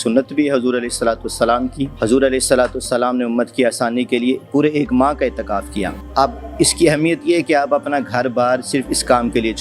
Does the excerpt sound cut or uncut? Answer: cut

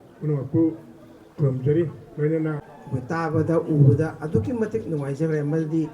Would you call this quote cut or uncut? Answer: cut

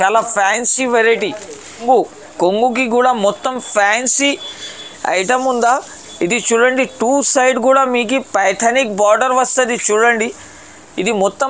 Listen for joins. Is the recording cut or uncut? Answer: cut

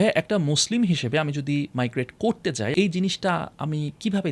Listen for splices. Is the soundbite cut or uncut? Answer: cut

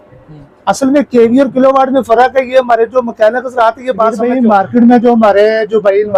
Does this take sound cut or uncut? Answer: cut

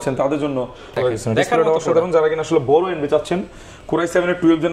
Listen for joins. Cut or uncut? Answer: cut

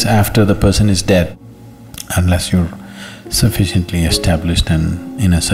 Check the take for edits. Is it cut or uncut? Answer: cut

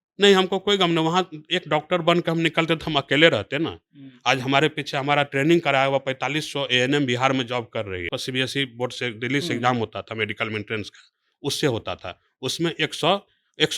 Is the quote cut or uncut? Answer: cut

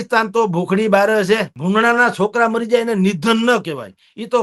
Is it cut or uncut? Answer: cut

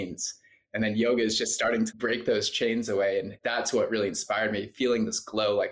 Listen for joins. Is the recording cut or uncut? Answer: cut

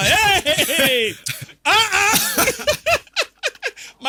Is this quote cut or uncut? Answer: uncut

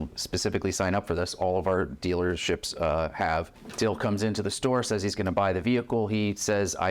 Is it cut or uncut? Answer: cut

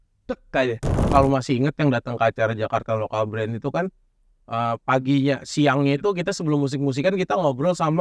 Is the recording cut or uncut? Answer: cut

